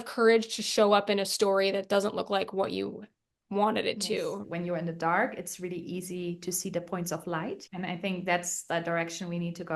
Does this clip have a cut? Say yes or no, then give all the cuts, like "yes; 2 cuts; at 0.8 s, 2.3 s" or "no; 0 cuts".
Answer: yes; 2 cuts; at 4.4 s, 7.6 s